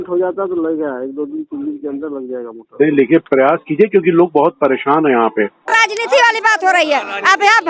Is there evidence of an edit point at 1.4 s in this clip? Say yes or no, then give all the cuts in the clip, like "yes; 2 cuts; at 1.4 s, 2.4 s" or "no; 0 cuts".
no; 1 cut; at 5.7 s